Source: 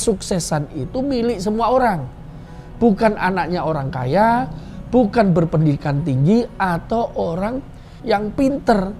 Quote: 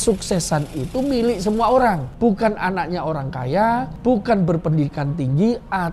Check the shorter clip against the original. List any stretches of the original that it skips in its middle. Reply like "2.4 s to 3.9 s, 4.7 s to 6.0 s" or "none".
2.1 s to 2.7 s, 4.5 s to 4.8 s

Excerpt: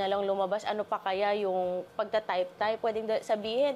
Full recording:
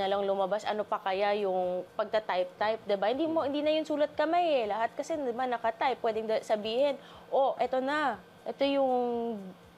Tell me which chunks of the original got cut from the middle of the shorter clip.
2.8 s to 6.0 s

